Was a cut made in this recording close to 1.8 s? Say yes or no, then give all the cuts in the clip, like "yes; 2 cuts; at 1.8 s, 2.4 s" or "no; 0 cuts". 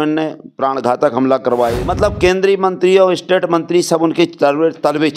yes; 1 cut; at 1.8 s